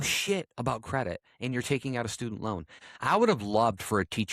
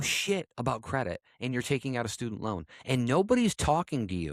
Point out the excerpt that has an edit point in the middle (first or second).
first